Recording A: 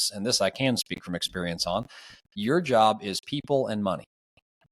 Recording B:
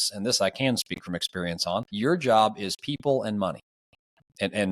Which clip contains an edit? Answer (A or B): B